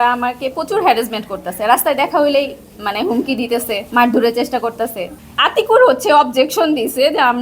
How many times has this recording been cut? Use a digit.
2